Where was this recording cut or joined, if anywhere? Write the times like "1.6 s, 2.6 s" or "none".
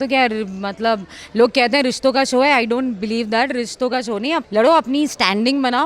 4.5 s